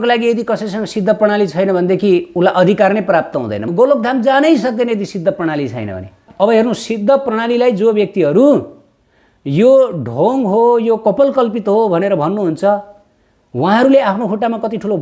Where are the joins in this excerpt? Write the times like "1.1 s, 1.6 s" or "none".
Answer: 3.7 s, 6.3 s